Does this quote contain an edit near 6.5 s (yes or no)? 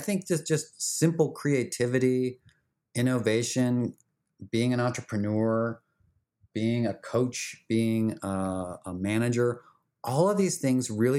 yes